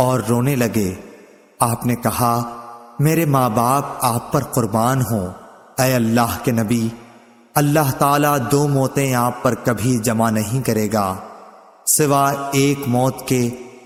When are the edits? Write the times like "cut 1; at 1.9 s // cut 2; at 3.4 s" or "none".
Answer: none